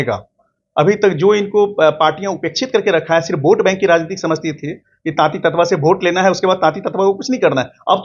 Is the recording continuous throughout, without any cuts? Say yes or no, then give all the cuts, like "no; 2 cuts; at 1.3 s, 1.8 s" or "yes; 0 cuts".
yes; 0 cuts